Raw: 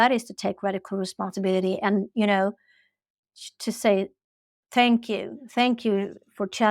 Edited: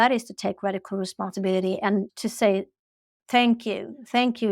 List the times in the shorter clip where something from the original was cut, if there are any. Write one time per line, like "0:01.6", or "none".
0:02.1